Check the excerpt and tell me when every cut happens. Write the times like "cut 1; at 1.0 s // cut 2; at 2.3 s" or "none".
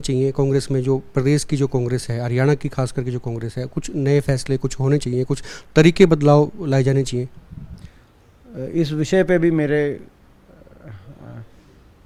none

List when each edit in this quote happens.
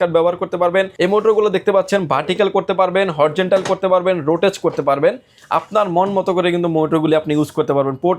cut 1; at 0.9 s

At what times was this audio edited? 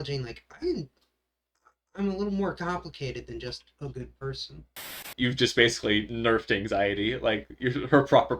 cut 1; at 5.1 s

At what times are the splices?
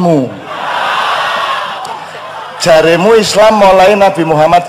cut 1; at 1.8 s

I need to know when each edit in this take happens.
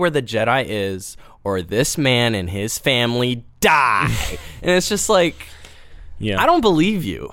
none

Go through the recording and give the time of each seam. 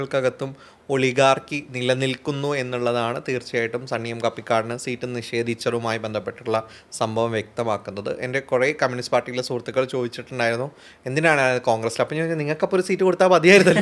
none

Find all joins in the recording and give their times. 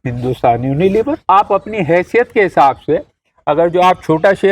cut 1; at 1.3 s

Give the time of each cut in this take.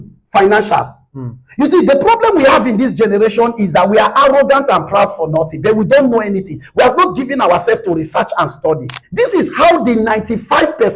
cut 1; at 9.0 s

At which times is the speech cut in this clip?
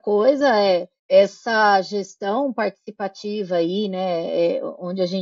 cut 1; at 0.9 s

